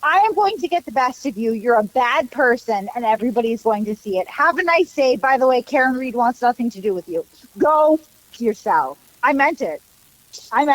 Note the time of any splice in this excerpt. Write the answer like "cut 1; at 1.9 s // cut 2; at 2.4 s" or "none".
none

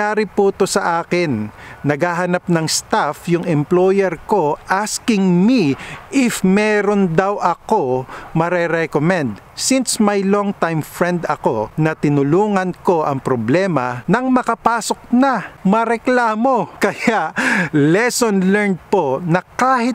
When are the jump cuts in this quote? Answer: cut 1; at 11.7 s // cut 2; at 13.9 s // cut 3; at 15.5 s // cut 4; at 16.7 s

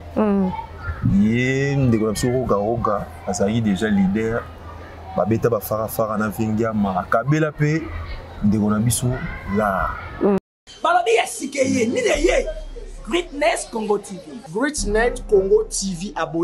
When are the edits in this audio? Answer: cut 1; at 10.4 s

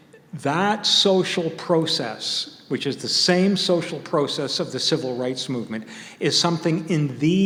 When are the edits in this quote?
none

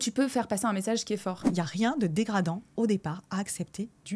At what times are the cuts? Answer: cut 1; at 1.4 s

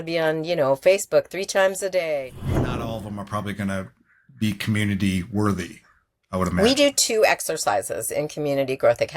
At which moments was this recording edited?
cut 1; at 2.9 s

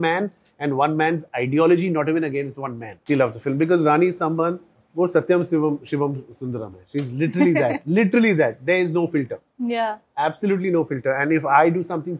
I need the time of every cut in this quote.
cut 1; at 2.9 s

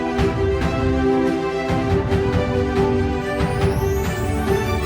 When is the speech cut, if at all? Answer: cut 1; at 3.5 s

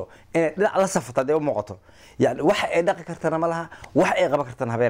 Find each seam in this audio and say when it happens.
none

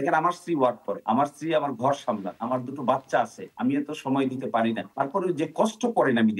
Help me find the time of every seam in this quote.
cut 1; at 0.9 s // cut 2; at 2.3 s // cut 3; at 3.4 s // cut 4; at 4.8 s

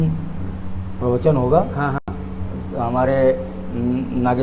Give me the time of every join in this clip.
none

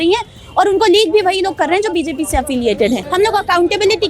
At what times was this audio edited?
cut 1; at 3.1 s

